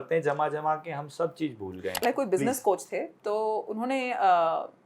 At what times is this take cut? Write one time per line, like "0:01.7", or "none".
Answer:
0:02.0